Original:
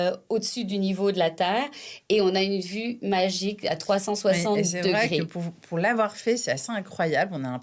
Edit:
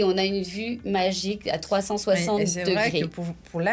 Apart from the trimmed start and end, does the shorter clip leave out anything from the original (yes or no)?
no